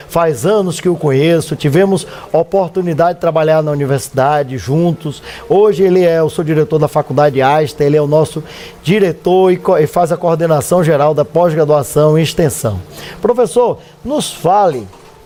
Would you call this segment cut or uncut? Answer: uncut